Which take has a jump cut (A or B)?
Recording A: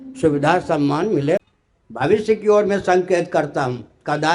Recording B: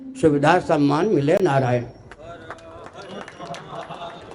A